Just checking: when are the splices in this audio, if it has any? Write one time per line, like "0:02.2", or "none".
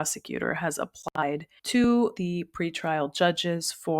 0:02.2